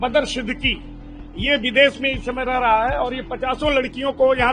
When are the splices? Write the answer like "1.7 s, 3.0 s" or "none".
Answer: none